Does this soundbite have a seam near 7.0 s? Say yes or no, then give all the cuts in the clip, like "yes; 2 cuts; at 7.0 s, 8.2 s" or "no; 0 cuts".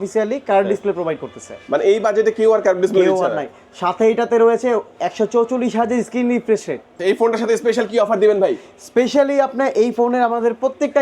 yes; 1 cut; at 7.0 s